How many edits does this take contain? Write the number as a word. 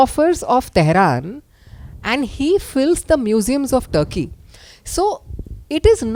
zero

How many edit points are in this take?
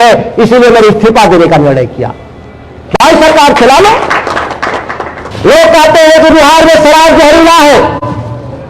one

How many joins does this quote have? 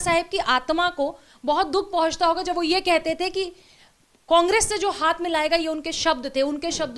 zero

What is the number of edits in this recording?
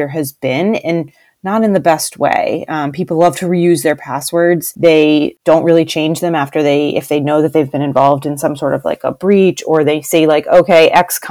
two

